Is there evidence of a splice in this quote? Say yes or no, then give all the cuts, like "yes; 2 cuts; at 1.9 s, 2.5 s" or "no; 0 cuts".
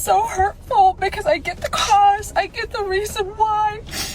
no; 0 cuts